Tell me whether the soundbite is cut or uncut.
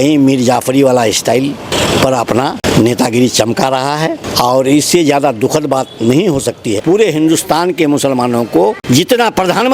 cut